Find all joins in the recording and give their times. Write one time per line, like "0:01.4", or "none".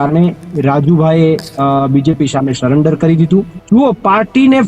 0:03.6